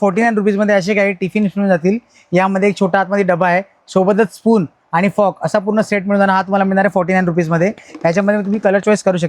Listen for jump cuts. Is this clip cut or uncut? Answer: uncut